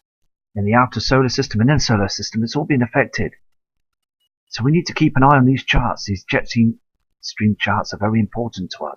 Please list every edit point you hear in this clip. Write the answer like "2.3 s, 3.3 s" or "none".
1.8 s